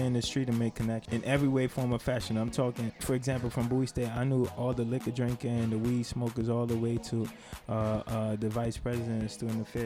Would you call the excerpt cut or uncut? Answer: cut